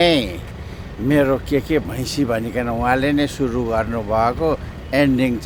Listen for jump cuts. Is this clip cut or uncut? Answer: uncut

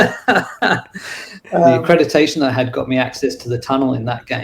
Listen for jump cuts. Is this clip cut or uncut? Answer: cut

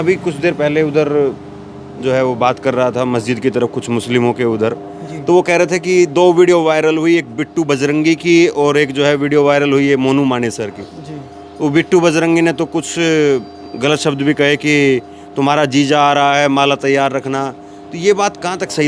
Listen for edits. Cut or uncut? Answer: uncut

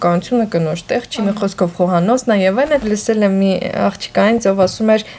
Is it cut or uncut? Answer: cut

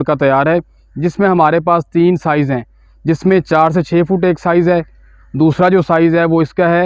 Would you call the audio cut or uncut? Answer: uncut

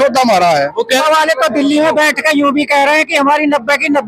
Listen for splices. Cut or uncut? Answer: cut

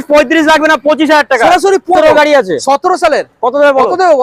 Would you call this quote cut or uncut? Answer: cut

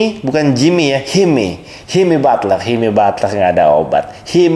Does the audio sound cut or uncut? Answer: uncut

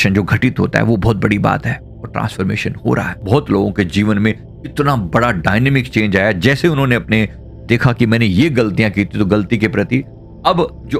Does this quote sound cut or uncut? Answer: uncut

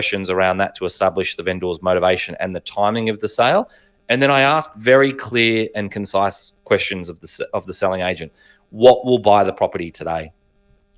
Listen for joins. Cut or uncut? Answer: uncut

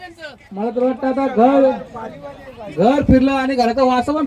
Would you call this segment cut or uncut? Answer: uncut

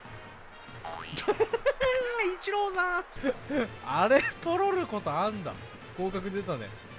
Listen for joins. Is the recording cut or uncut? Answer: cut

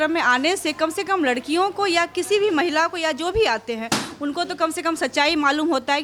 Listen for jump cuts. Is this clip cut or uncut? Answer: uncut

